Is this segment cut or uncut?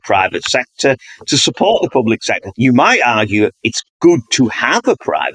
cut